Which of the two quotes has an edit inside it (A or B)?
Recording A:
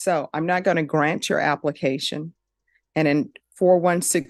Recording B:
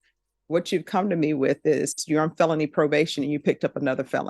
B